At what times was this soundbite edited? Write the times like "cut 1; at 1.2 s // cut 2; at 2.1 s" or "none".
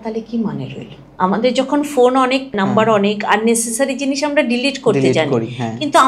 cut 1; at 1.0 s // cut 2; at 2.6 s